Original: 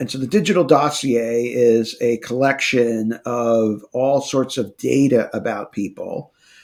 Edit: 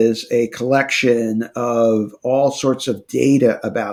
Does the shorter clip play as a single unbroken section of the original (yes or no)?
yes